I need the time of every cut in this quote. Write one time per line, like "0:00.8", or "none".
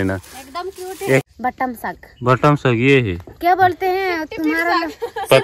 0:01.3

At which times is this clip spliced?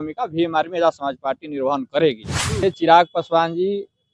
0:02.6

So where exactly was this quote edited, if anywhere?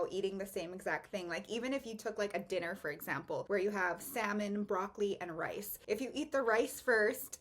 0:03.4
0:05.7

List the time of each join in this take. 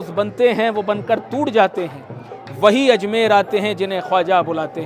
none

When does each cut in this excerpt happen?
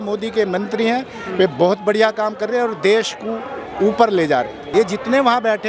0:04.6

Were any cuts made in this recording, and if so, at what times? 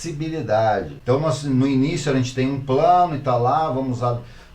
0:00.9

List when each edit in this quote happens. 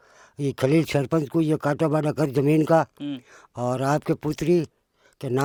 none

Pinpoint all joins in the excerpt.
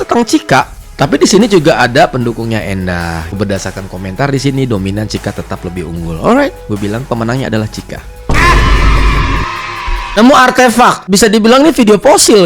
0:03.4
0:10.2
0:11.0

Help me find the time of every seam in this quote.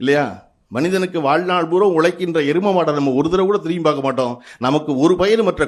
none

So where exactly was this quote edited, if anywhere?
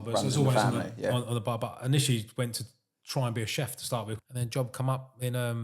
0:04.2

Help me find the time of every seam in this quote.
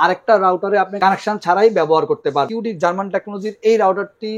0:00.9
0:02.5

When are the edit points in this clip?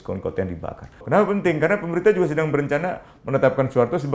0:01.0

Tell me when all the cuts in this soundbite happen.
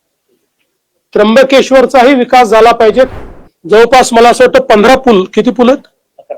0:03.1

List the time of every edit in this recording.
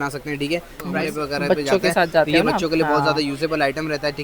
0:00.9

